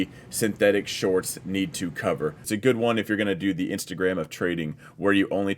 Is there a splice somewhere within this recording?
yes; 1 cut; at 2.4 s

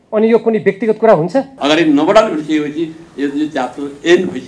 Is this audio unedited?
no; 1 cut; at 1.5 s

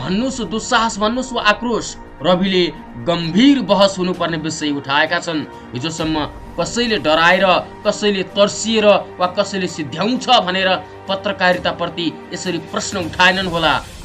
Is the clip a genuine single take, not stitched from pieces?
yes; 0 cuts

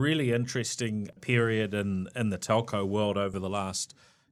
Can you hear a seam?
no; 0 cuts

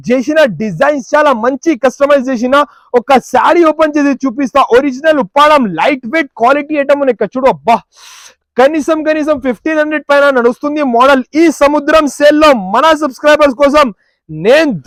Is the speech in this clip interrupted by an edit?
no; 0 cuts

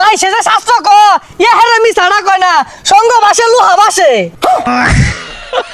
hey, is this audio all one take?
no; 1 cut; at 4.7 s

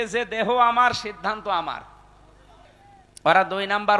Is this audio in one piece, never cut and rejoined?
no; 1 cut; at 2.8 s

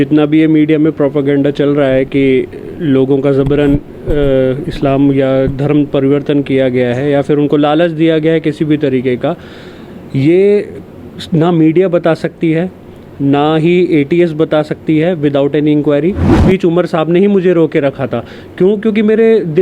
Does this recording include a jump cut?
yes; 1 cut; at 16.4 s

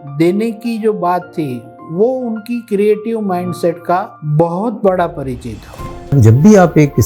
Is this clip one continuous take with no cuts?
no; 2 cuts; at 4.2 s, 6.2 s

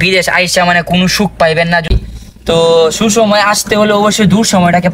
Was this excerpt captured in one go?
no; 1 cut; at 2.0 s

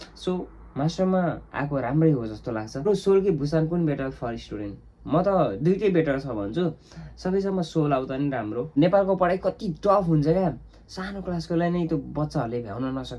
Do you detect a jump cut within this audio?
yes; 2 cuts; at 2.9 s, 8.7 s

